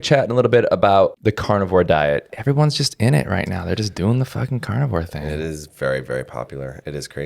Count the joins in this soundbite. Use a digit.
1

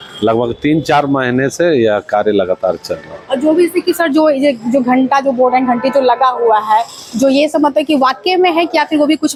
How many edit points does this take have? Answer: 0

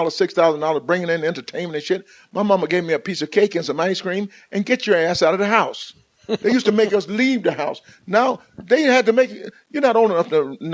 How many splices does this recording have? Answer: 1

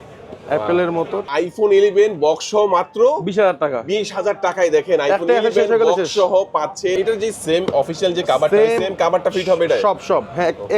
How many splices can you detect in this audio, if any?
2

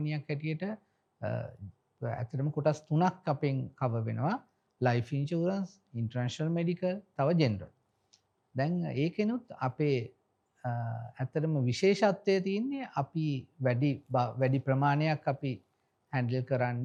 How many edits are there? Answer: 0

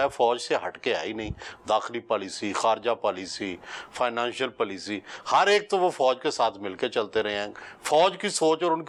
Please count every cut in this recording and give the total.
0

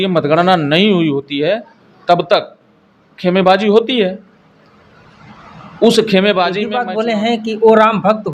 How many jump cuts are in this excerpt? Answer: 1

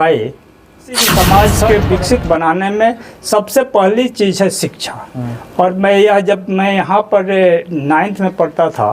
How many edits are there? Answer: 1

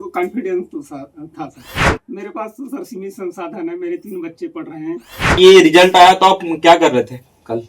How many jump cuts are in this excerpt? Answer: 2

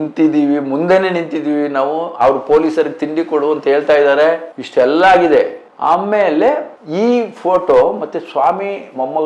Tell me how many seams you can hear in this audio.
0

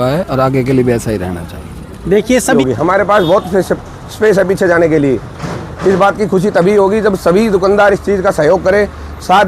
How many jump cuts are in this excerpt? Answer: 1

